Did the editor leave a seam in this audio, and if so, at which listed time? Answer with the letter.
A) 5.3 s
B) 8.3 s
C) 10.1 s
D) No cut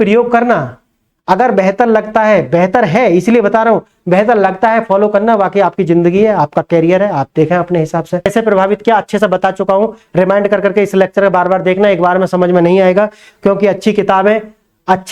B